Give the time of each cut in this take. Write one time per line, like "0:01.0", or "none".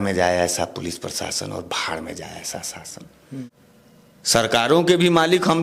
0:03.4